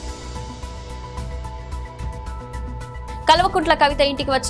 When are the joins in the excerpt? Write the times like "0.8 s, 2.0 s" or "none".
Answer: 1.0 s